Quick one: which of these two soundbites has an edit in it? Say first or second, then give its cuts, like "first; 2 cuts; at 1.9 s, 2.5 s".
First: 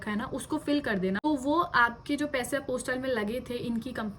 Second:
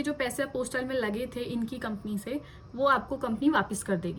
first; 1 cut; at 1.2 s